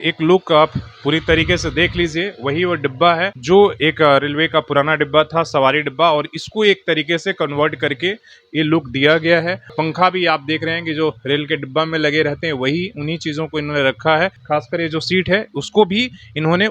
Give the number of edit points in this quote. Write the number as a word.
three